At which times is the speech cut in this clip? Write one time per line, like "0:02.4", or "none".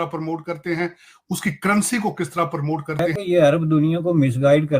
0:03.1